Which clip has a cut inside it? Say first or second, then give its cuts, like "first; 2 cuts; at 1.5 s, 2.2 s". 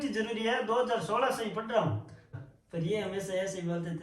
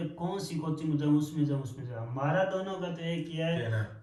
first; 1 cut; at 2.3 s